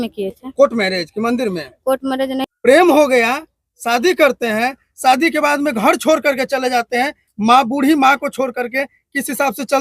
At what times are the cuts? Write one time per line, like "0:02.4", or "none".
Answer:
0:02.4